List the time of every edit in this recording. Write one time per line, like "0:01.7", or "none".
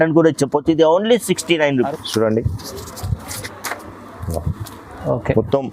0:01.9